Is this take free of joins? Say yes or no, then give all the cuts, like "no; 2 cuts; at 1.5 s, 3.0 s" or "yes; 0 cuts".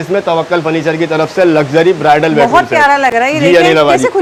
yes; 0 cuts